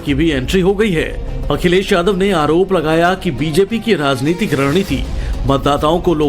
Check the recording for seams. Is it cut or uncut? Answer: cut